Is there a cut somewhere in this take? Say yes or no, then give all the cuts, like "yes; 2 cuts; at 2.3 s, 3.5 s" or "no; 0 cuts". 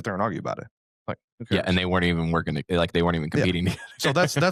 no; 0 cuts